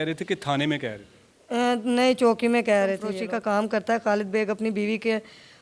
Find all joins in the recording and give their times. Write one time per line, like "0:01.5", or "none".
0:03.1